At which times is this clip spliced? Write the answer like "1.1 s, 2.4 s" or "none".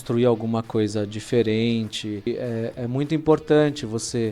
2.3 s